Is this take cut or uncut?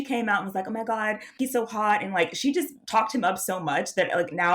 cut